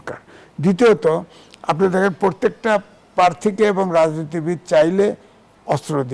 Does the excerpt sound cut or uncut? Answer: uncut